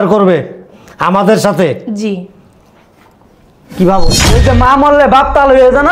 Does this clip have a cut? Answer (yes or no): yes